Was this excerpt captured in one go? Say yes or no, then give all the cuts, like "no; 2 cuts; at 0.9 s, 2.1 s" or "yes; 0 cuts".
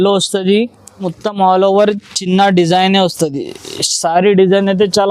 no; 1 cut; at 1.1 s